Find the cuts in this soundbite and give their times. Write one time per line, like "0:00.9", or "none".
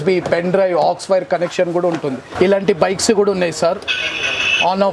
0:02.2